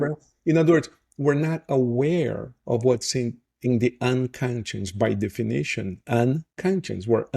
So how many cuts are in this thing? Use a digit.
0